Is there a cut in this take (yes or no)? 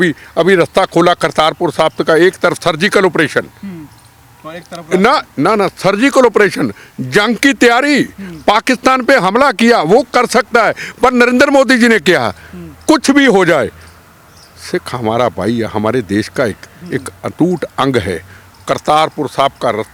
no